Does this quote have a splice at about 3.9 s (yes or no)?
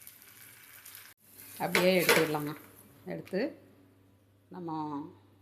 no